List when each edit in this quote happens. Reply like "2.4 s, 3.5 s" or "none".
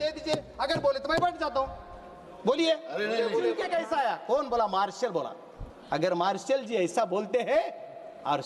3.6 s

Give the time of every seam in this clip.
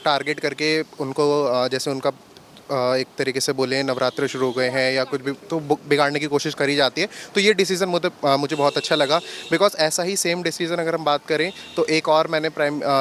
none

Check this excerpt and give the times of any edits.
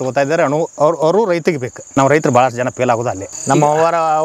1.7 s, 3.3 s

